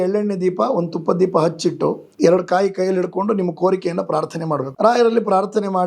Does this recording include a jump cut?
yes; 2 cuts; at 2.1 s, 4.7 s

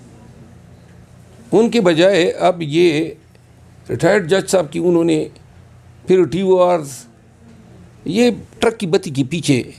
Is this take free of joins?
yes; 0 cuts

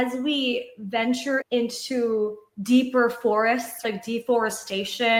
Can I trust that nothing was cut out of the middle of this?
yes; 0 cuts

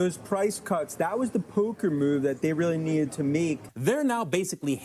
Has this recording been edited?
yes; 1 cut; at 3.7 s

